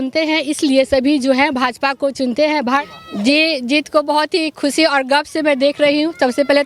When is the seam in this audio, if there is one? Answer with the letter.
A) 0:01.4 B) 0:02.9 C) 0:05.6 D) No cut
B